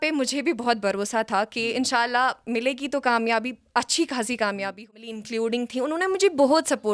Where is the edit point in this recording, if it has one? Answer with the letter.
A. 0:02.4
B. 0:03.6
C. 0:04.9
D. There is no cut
C